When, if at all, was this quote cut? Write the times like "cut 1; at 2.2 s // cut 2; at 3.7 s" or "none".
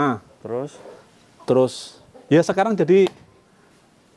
none